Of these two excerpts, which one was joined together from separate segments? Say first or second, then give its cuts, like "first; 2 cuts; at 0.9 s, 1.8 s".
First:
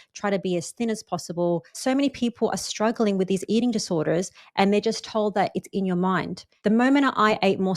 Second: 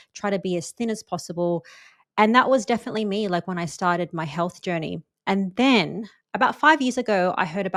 first; 2 cuts; at 1.7 s, 6.4 s